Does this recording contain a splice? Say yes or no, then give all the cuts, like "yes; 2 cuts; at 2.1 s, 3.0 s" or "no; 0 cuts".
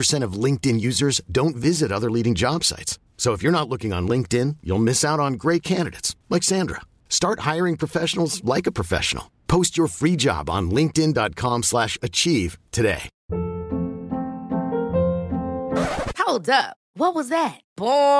yes; 1 cut; at 13.1 s